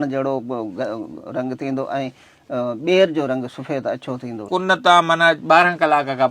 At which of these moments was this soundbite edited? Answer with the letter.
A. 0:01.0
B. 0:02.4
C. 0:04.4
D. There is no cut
C